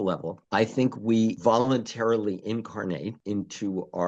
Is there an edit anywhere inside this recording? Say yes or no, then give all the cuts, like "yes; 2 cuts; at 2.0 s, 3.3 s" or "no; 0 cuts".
yes; 1 cut; at 1.4 s